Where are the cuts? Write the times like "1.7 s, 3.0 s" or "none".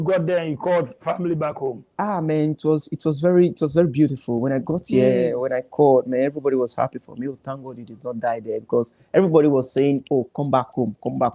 none